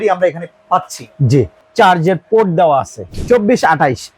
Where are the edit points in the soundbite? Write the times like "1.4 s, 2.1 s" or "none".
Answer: 1.6 s, 3.1 s